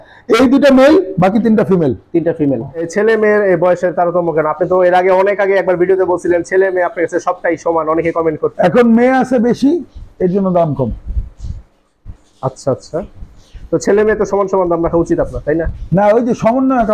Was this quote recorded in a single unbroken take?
no; 1 cut; at 2.9 s

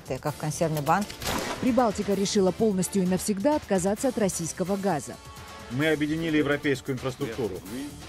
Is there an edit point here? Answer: yes; 1 cut; at 1.1 s

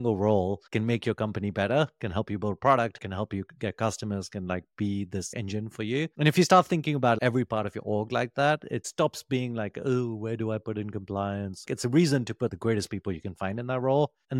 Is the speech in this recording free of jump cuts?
no; 3 cuts; at 3.0 s, 8.8 s, 11.7 s

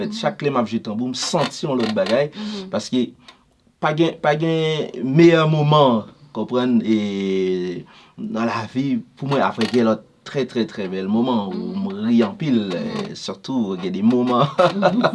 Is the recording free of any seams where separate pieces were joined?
yes; 0 cuts

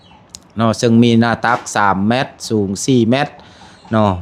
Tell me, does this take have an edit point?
no; 0 cuts

